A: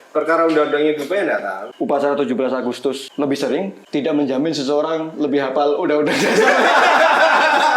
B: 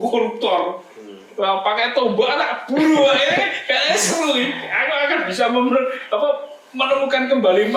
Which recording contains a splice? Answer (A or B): A